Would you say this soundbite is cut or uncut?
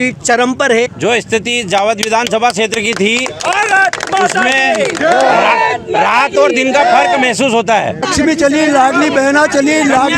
cut